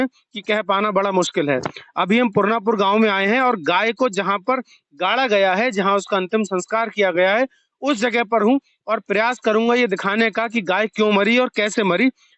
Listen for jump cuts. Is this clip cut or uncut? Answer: uncut